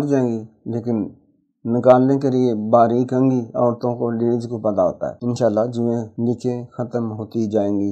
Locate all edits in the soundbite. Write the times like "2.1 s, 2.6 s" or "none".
5.1 s, 6.1 s